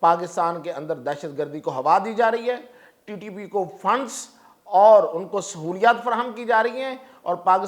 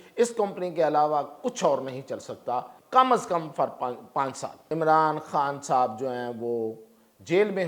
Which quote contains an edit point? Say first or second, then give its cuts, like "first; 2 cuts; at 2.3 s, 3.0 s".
second; 2 cuts; at 2.8 s, 4.5 s